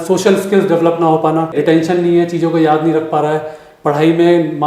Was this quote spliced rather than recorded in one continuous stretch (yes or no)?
yes